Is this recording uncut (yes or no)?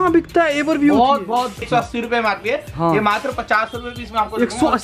no